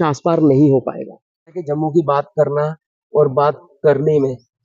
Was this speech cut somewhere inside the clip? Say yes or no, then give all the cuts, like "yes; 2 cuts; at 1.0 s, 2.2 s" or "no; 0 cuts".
yes; 1 cut; at 1.7 s